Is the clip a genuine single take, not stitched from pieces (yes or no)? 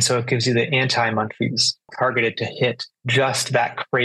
no